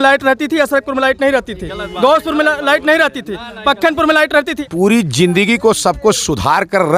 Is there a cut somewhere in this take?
yes; 1 cut; at 4.6 s

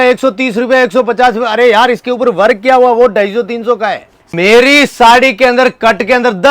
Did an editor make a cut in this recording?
yes; 1 cut; at 4.3 s

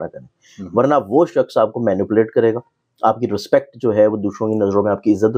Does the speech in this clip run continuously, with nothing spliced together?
yes; 0 cuts

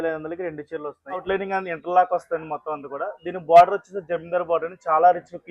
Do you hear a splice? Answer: yes; 1 cut; at 1.2 s

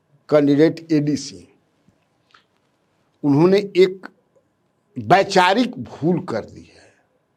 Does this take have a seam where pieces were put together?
no; 0 cuts

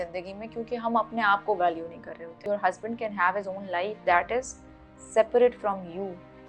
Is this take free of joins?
no; 1 cut; at 2.4 s

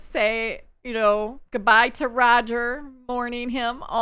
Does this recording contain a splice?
no; 0 cuts

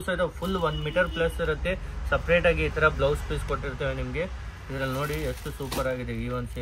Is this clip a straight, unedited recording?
yes; 0 cuts

